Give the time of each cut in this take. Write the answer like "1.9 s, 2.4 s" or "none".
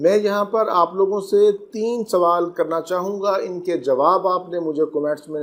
none

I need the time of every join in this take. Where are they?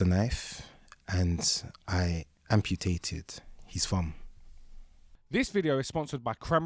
none

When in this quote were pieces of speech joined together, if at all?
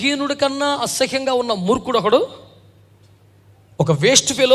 none

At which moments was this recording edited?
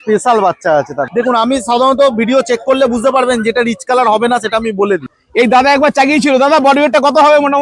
1.0 s, 5.2 s

